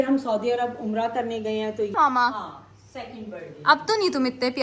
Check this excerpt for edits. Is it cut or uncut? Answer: cut